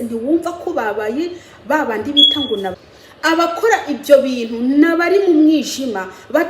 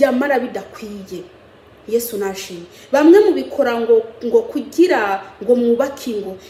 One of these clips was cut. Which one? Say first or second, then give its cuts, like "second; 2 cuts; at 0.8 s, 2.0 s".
first; 1 cut; at 2.7 s